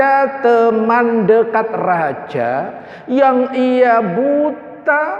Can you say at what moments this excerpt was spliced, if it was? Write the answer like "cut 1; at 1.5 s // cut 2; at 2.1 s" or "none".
none

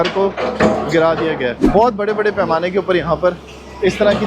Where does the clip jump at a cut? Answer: cut 1; at 1.6 s

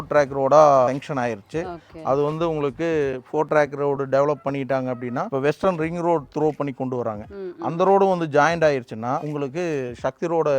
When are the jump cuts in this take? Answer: cut 1; at 0.9 s // cut 2; at 5.3 s // cut 3; at 9.3 s

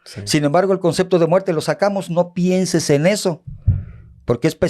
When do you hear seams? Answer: none

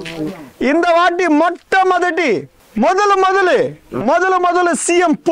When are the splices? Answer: cut 1; at 2.6 s

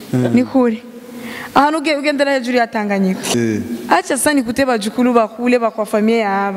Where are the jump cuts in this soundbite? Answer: cut 1; at 3.3 s

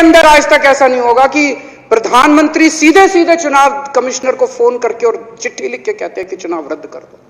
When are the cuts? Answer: none

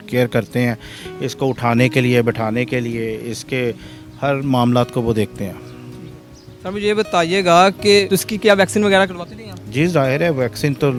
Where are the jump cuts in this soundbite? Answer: none

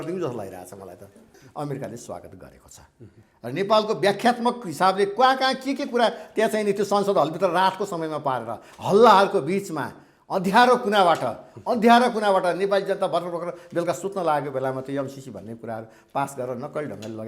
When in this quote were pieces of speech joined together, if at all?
cut 1; at 1.4 s

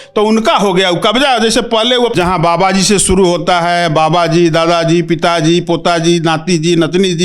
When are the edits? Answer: cut 1; at 2.1 s

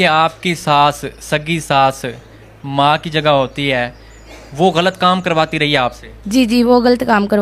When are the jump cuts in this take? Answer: none

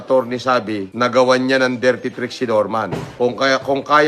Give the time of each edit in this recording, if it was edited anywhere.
cut 1; at 3.2 s

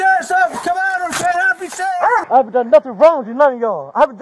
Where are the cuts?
cut 1; at 2.2 s

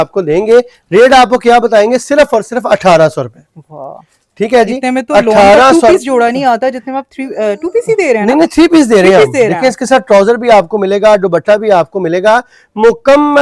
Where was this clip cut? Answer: none

